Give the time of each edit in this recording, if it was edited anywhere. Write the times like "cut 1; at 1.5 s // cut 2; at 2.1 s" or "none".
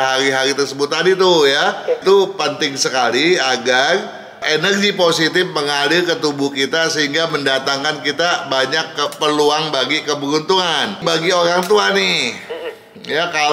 cut 1; at 2.0 s // cut 2; at 11.0 s